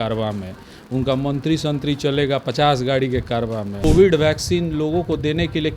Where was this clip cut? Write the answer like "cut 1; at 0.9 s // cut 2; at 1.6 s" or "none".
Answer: cut 1; at 3.7 s